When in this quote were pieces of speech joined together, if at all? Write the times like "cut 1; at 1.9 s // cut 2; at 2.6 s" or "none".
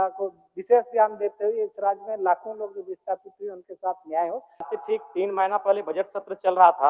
cut 1; at 4.7 s